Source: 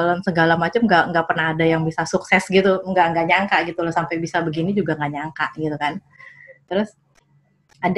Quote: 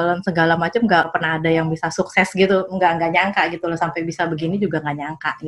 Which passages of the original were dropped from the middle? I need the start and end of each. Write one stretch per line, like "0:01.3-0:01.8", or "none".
0:01.1-0:01.2